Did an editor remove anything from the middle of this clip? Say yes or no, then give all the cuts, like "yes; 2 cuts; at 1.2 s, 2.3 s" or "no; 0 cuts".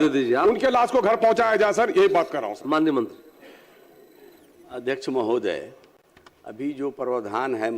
no; 0 cuts